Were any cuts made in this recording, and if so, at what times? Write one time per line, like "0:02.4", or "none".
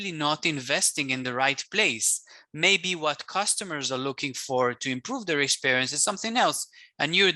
none

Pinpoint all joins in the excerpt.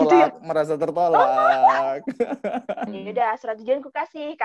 0:02.9

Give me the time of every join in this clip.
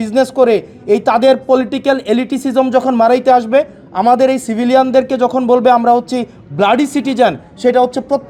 none

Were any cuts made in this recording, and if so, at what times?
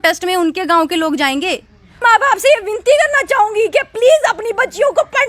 0:02.0

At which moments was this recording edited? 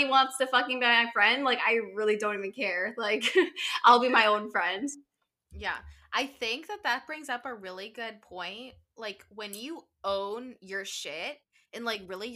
0:01.0

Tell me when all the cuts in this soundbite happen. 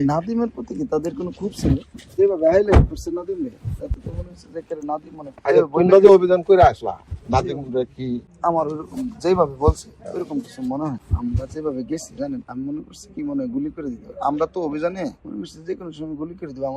0:02.1
0:08.3
0:11.0

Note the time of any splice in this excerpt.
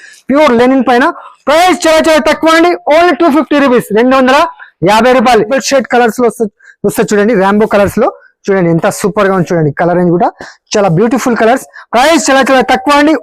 0:05.6

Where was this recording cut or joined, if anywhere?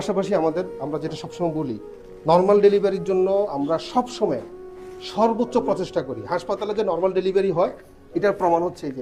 none

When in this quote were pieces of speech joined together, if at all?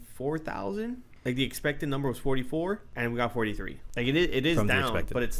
0:01.1
0:02.9
0:03.8

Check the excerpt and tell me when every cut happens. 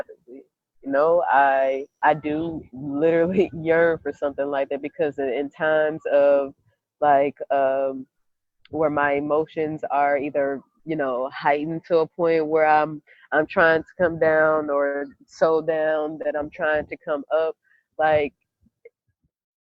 0:02.0

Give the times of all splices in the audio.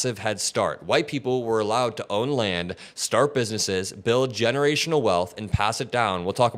none

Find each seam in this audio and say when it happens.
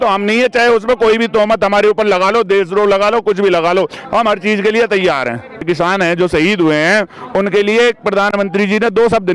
0:05.6

